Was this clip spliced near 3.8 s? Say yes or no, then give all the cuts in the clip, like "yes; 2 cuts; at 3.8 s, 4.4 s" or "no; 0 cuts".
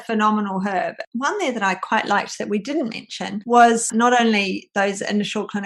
yes; 2 cuts; at 1.0 s, 3.8 s